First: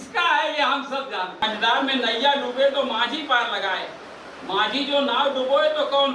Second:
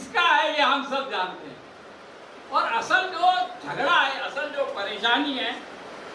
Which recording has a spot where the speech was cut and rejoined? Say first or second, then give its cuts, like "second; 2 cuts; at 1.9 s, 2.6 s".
first; 1 cut; at 1.4 s